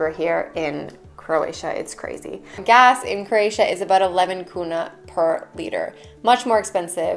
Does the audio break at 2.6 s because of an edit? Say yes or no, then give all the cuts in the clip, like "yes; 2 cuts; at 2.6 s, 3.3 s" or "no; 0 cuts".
yes; 1 cut; at 2.6 s